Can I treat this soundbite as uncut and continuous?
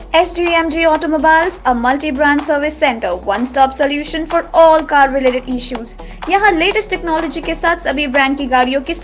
yes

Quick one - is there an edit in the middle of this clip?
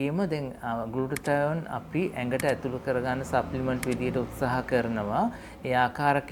no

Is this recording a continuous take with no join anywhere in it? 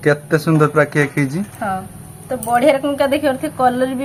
yes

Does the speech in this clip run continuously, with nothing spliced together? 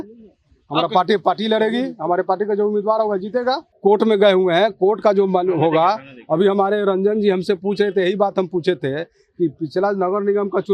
no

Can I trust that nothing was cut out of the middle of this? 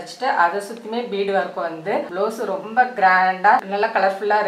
no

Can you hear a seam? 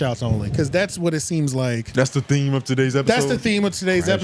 no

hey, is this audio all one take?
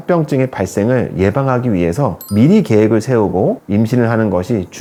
yes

